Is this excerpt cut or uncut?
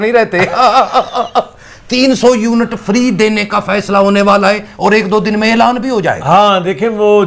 uncut